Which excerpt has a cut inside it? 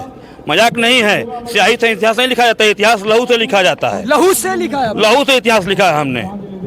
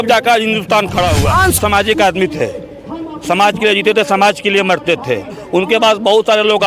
second; 1 cut; at 1.6 s

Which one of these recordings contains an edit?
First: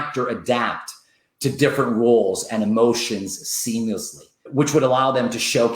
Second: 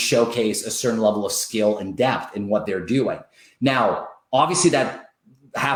first; 1 cut; at 4.3 s

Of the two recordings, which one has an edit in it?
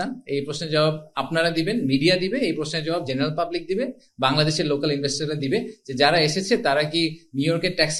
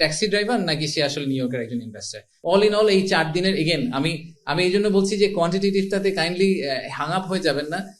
second; 1 cut; at 2.3 s

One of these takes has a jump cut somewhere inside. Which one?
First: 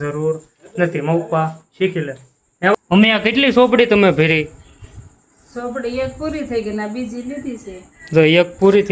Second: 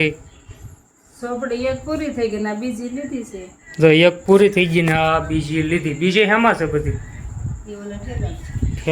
first; 1 cut; at 2.7 s

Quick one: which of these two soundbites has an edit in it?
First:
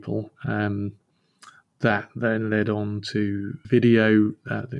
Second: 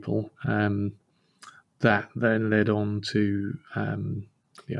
first; 1 cut; at 3.6 s

